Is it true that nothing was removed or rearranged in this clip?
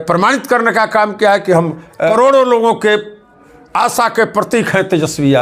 no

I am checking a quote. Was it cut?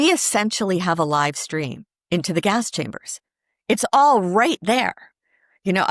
no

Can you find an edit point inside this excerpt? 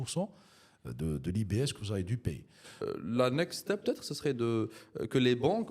yes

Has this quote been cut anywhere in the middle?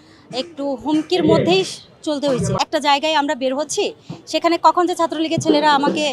yes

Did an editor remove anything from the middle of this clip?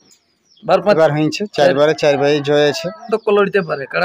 yes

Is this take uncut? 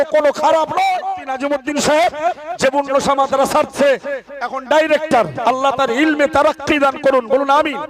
no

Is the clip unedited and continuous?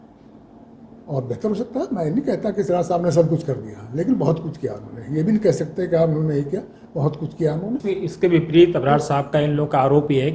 no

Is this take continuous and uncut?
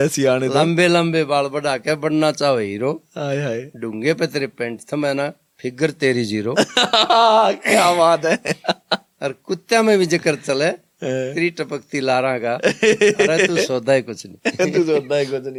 yes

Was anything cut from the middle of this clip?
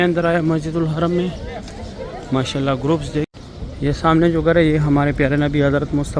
yes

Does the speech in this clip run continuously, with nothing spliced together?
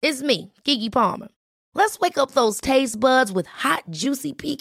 yes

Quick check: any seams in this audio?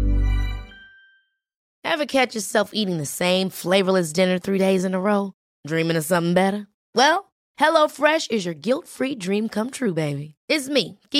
yes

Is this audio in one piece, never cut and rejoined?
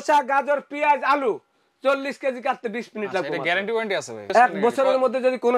no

